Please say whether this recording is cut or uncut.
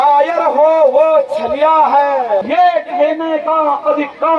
cut